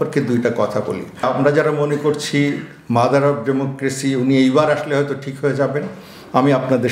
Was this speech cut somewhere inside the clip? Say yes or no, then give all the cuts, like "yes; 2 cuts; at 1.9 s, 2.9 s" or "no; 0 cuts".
no; 0 cuts